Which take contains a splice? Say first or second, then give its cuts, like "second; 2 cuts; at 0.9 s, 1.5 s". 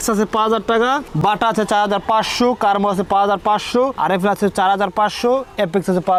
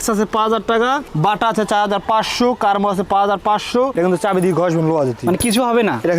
second; 1 cut; at 3.9 s